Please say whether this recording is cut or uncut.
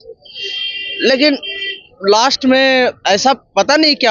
uncut